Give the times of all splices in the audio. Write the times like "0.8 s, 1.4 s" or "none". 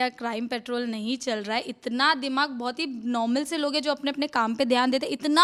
none